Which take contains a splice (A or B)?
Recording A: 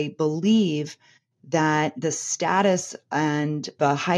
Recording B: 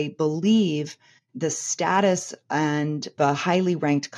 B